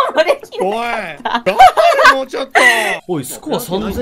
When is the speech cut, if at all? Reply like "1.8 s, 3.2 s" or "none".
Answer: 1.4 s, 3.0 s